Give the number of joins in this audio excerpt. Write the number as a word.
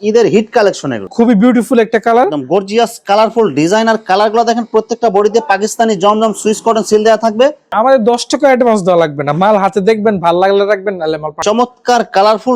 three